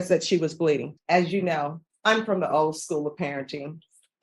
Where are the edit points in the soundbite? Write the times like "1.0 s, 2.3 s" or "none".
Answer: 0.9 s, 1.8 s